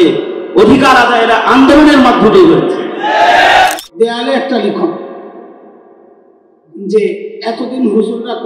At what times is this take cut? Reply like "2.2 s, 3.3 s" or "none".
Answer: 3.7 s